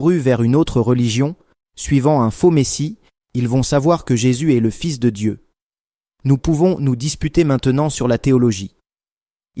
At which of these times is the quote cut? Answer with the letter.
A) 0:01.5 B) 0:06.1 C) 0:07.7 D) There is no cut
D